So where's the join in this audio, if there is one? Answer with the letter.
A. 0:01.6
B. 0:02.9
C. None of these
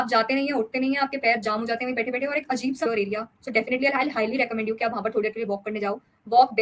B